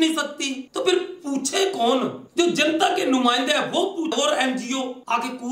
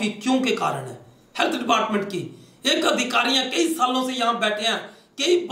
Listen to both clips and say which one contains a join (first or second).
first